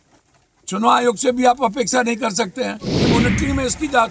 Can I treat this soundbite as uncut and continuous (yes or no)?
no